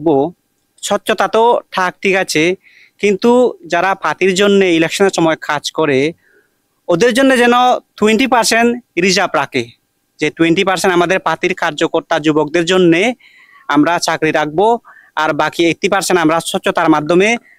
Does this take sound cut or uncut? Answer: uncut